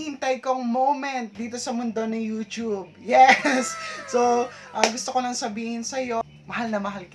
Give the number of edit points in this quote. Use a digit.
1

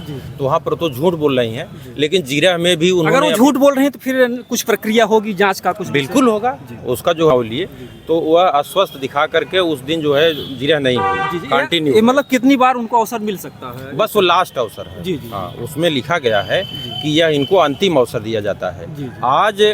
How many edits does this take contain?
1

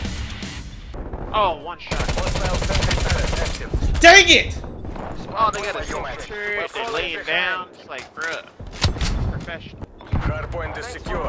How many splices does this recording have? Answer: 2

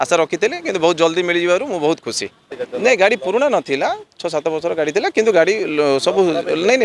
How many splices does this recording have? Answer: 1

